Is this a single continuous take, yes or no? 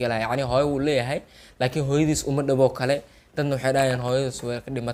yes